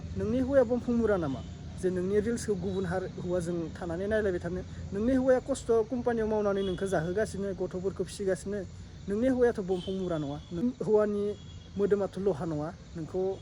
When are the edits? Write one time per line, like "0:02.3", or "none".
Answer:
0:10.6